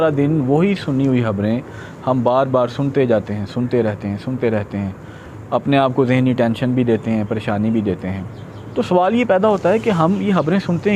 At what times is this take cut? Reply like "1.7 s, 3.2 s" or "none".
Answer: none